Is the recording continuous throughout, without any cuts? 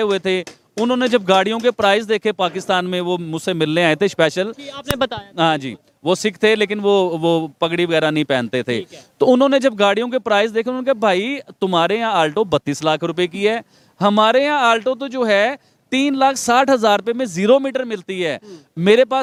yes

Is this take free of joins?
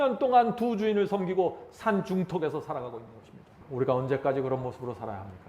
no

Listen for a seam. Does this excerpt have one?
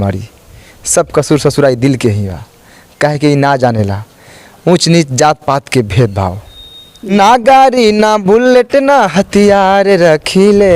yes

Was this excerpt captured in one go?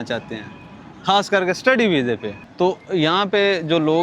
no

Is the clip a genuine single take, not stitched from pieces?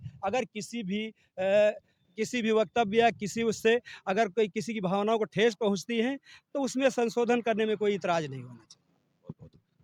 yes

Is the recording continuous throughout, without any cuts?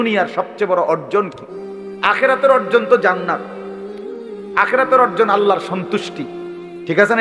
yes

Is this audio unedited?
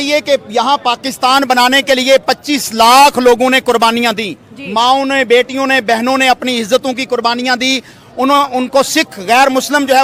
yes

